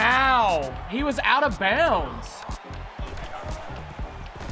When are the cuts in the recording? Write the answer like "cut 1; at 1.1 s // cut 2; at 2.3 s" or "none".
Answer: cut 1; at 2.6 s

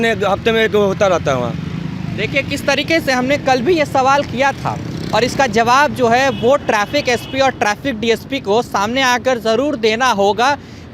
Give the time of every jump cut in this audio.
none

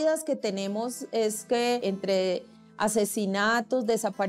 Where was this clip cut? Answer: cut 1; at 1.8 s

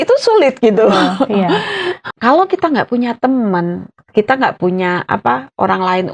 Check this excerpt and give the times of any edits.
cut 1; at 2.0 s

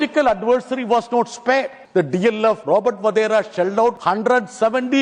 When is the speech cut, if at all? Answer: cut 1; at 1.8 s // cut 2; at 2.6 s // cut 3; at 4.0 s

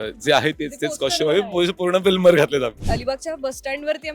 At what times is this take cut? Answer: cut 1; at 2.8 s

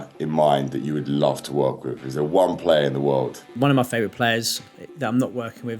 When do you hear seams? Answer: cut 1; at 3.6 s

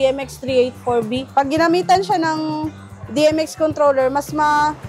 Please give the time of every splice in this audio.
cut 1; at 1.2 s

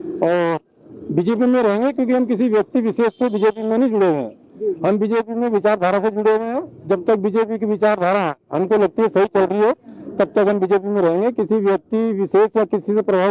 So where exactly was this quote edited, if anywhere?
none

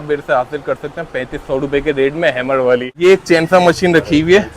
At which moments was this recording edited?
cut 1; at 2.9 s

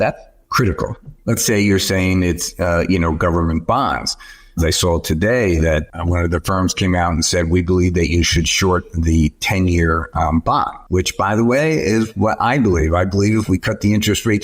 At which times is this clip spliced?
cut 1; at 1.1 s // cut 2; at 4.6 s

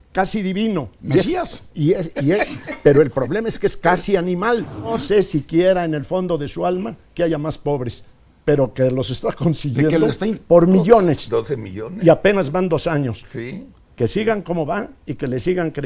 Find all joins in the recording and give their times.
cut 1; at 5.0 s

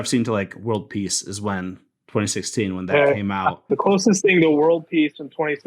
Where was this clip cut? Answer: cut 1; at 3.7 s

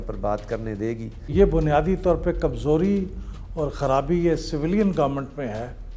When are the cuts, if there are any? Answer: cut 1; at 1.3 s

